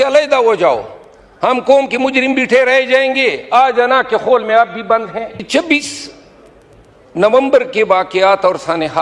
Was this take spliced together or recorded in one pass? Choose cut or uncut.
cut